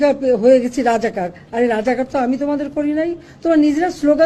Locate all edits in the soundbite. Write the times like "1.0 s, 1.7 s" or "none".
none